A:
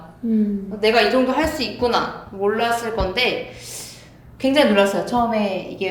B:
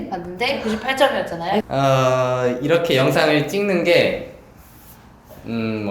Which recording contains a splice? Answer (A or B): B